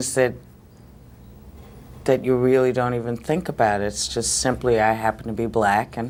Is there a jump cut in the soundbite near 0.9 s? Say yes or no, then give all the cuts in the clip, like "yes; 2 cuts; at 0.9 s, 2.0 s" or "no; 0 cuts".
no; 0 cuts